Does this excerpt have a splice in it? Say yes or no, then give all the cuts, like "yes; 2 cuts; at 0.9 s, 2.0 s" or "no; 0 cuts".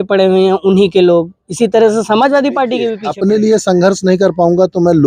yes; 1 cut; at 3.0 s